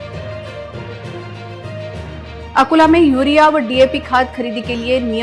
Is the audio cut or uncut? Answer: uncut